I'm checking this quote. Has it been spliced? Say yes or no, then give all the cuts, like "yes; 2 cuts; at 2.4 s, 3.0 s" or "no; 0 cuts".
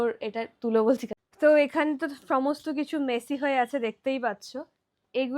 yes; 1 cut; at 1.2 s